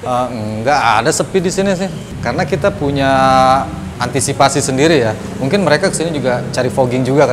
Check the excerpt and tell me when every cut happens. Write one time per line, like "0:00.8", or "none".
0:02.1